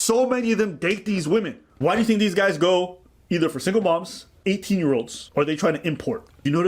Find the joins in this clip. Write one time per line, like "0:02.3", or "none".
0:01.6
0:05.2